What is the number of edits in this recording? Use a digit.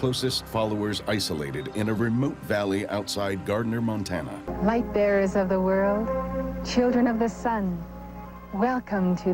1